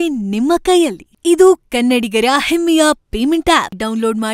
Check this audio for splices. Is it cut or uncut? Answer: uncut